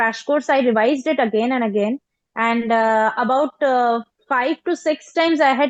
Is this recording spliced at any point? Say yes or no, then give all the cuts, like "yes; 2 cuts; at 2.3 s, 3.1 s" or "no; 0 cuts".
no; 0 cuts